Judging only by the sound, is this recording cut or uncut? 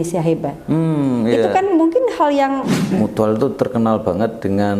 cut